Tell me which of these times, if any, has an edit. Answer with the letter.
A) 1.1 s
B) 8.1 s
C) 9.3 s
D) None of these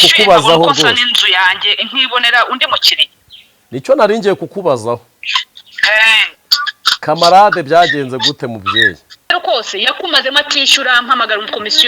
C